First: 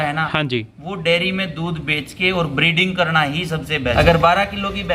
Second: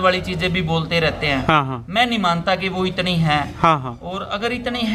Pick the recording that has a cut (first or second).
first